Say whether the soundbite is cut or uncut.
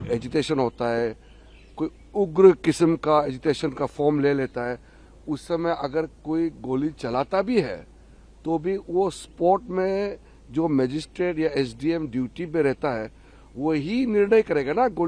uncut